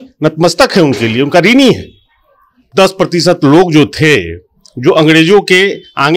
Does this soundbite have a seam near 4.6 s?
no; 1 cut; at 2.6 s

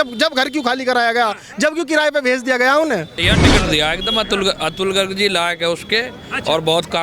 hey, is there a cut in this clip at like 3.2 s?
yes; 1 cut; at 3.2 s

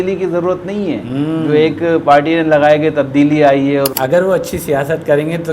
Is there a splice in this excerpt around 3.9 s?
yes; 1 cut; at 3.9 s

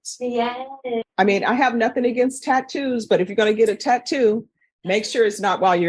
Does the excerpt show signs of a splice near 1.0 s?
yes; 1 cut; at 1.0 s

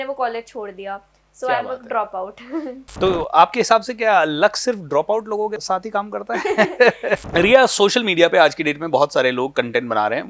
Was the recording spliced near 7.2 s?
yes; 2 cuts; at 5.6 s, 7.2 s

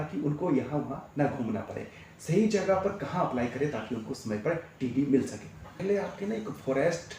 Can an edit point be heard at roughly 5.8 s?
yes; 1 cut; at 5.8 s

